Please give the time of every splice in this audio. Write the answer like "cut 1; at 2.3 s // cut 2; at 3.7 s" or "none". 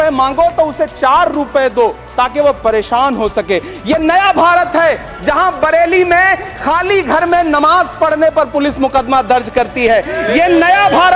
none